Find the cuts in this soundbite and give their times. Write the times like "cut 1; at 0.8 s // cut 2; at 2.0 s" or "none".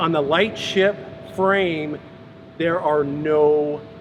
none